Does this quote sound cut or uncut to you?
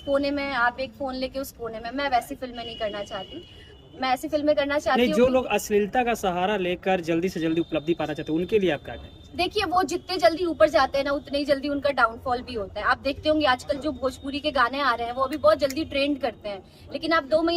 uncut